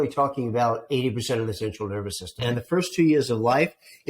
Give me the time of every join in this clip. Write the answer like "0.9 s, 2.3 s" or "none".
2.4 s